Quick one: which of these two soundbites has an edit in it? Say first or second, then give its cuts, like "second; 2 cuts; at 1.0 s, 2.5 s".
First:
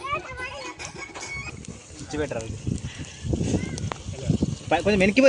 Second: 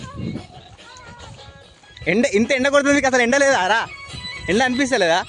first; 1 cut; at 1.5 s